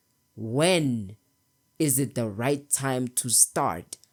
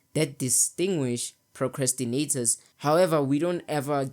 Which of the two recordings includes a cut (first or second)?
second